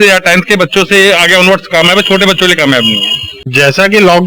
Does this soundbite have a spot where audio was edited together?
yes; 1 cut; at 3.4 s

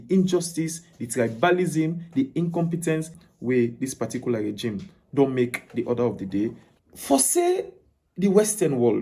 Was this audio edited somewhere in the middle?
yes; 2 cuts; at 3.2 s, 6.7 s

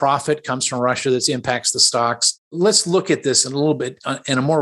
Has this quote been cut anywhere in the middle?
yes; 1 cut; at 2.5 s

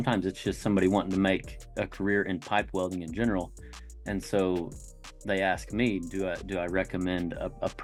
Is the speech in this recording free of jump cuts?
yes; 0 cuts

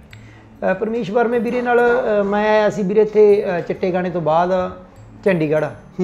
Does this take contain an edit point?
no; 0 cuts

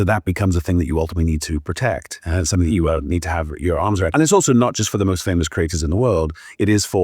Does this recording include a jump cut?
yes; 1 cut; at 4.1 s

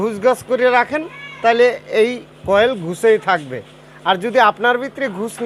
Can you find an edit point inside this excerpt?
no; 0 cuts

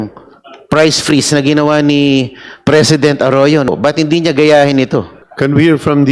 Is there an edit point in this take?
yes; 2 cuts; at 3.7 s, 5.2 s

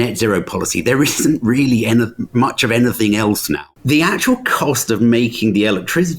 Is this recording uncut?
no; 1 cut; at 3.7 s

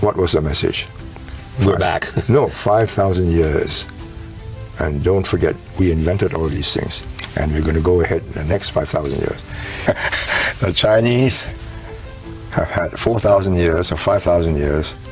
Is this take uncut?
no; 1 cut; at 9.7 s

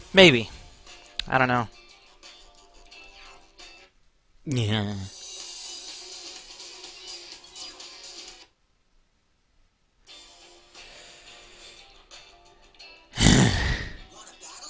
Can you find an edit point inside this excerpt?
no; 0 cuts

